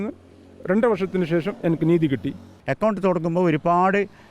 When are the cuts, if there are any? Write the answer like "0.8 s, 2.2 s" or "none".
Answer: 2.5 s